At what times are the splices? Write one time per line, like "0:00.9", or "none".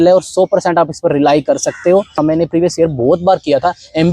0:02.2